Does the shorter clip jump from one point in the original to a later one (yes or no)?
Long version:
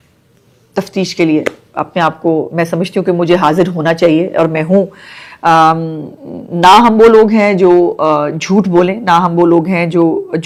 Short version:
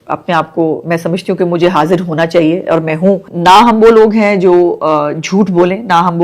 yes